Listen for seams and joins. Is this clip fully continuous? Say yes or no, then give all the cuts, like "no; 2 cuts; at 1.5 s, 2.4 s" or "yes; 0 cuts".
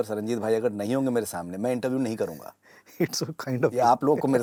yes; 0 cuts